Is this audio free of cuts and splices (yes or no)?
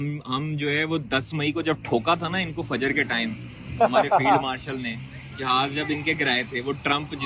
yes